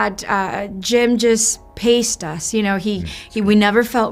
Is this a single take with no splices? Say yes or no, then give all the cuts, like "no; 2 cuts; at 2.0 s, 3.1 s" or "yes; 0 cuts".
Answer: yes; 0 cuts